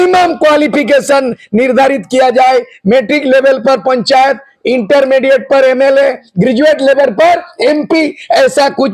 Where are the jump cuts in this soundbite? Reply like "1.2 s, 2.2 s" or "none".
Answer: none